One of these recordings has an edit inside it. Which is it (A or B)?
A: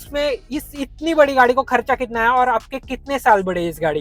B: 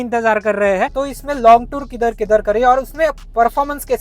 B